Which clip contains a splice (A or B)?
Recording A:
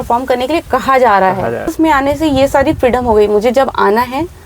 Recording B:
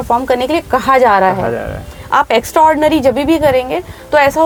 A